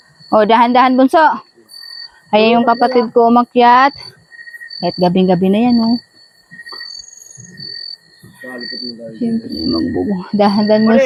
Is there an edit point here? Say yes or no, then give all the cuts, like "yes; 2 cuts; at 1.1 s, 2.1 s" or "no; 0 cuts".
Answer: no; 0 cuts